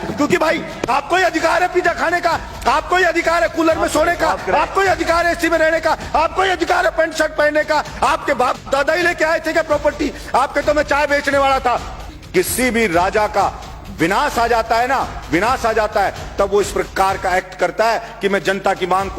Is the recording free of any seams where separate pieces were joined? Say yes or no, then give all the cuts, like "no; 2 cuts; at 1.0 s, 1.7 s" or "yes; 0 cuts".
no; 1 cut; at 12.1 s